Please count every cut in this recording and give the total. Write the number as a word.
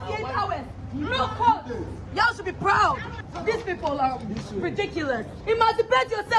two